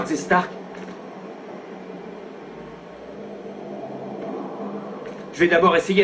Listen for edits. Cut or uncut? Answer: cut